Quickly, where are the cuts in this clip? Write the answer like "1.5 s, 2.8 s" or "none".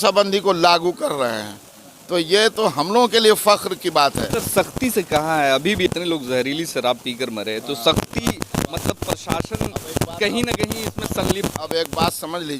5.8 s

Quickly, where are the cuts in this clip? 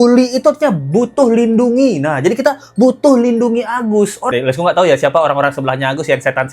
4.2 s

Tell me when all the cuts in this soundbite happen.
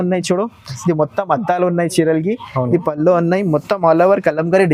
none

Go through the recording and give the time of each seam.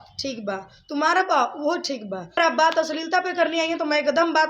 2.4 s

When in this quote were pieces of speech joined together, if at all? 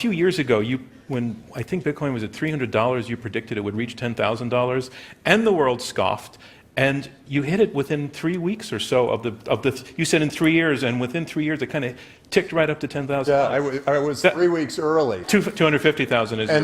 15.2 s

